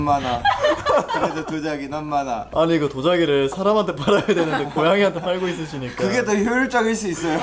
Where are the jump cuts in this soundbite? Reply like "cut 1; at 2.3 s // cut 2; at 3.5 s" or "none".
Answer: none